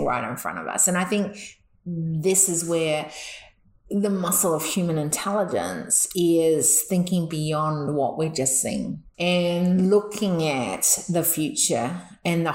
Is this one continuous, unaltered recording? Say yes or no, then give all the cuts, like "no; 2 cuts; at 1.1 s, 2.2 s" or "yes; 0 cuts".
no; 1 cut; at 9.0 s